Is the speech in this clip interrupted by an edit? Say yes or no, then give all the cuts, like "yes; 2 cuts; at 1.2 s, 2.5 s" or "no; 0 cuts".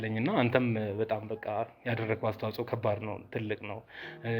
no; 0 cuts